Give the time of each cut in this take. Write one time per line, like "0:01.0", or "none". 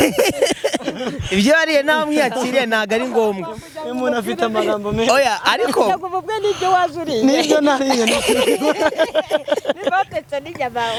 none